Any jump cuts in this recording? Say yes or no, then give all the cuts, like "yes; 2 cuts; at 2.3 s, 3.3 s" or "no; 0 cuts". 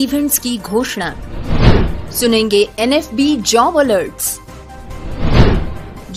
no; 0 cuts